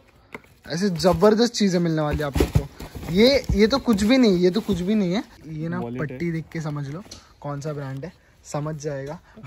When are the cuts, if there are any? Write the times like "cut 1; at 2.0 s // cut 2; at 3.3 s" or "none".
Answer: cut 1; at 5.5 s